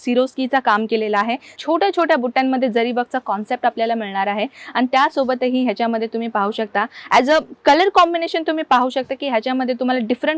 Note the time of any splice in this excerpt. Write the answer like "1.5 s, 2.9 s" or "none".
1.5 s